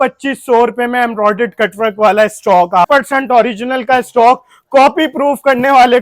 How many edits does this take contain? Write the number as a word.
one